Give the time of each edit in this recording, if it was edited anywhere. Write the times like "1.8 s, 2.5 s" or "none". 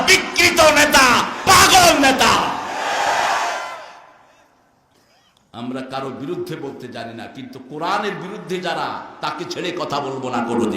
none

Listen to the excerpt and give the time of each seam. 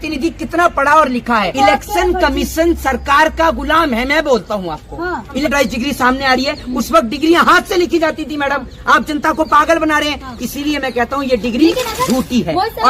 1.5 s, 5.4 s

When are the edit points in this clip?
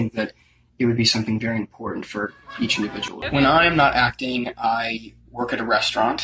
3.1 s

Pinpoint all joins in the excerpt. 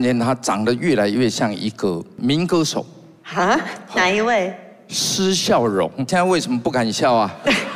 2.1 s, 6.1 s

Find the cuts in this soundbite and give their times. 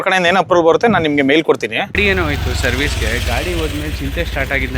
1.9 s

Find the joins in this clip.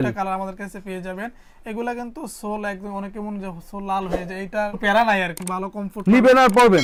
none

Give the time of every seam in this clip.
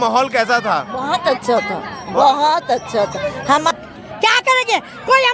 3.7 s

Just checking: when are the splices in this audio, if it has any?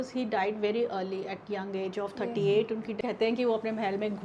2.9 s

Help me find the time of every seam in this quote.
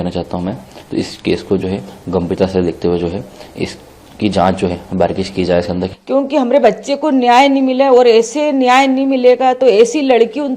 5.8 s

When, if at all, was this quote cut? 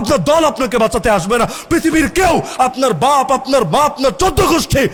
none

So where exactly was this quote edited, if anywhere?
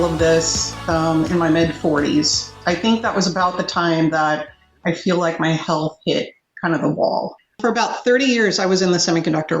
2.6 s, 7.5 s

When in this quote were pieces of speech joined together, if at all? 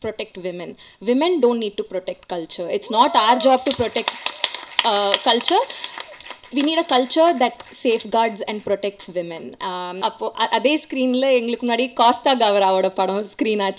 10.0 s

